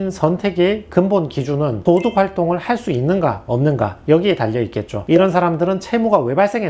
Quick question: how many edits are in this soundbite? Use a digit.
1